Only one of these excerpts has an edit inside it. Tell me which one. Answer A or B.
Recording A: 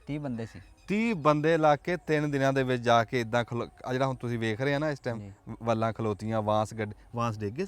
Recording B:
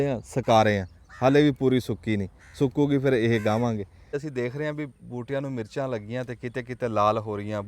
B